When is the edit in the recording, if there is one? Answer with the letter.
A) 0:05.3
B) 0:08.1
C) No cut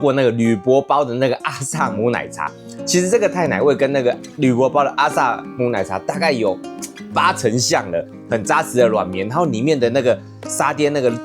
B